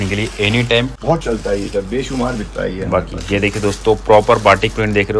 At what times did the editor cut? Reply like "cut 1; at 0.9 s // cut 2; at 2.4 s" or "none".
cut 1; at 0.9 s